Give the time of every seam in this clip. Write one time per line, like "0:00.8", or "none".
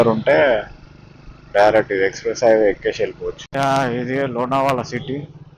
0:03.4